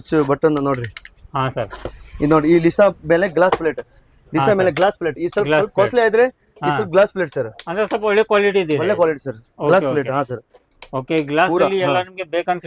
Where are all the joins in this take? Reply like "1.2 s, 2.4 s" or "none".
none